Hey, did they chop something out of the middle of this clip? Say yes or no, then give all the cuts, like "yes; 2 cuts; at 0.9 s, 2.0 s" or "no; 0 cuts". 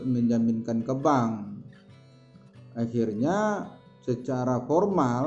no; 0 cuts